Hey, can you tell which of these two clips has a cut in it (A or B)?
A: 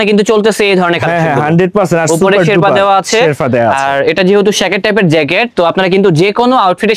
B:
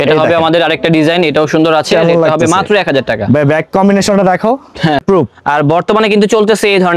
B